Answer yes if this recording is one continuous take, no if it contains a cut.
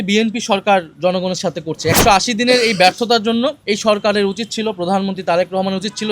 no